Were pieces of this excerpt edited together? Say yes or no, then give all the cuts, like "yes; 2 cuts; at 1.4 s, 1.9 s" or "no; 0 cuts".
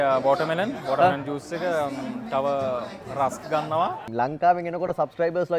yes; 1 cut; at 4.0 s